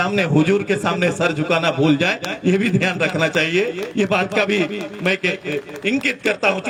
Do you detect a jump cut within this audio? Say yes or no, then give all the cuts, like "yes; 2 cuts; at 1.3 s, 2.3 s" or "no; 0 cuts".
no; 0 cuts